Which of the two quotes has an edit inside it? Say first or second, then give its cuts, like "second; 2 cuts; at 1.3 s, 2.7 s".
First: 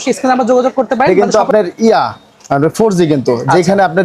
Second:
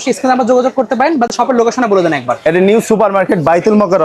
first; 1 cut; at 1.1 s